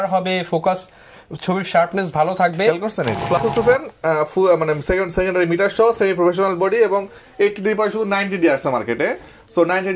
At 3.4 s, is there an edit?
yes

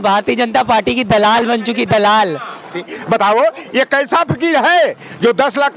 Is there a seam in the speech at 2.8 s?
yes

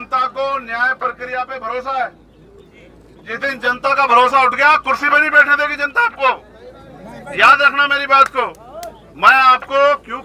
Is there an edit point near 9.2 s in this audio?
no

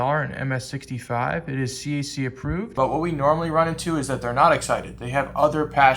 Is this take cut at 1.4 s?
no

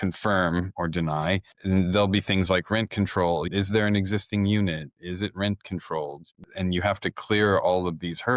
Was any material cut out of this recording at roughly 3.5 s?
yes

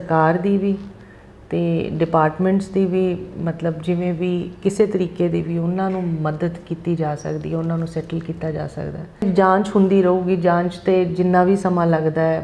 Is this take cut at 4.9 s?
no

